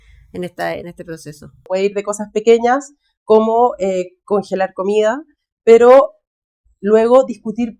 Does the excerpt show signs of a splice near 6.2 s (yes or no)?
no